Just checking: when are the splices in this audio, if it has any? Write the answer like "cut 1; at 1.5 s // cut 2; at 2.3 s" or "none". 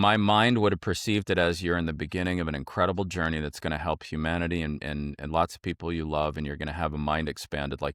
none